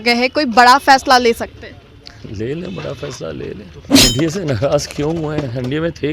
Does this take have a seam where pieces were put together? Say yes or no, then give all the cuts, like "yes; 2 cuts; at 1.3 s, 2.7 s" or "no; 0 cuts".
yes; 1 cut; at 4.0 s